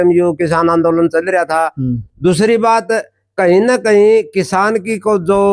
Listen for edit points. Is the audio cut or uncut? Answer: uncut